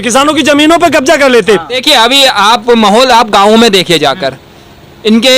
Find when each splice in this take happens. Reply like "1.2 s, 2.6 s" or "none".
1.8 s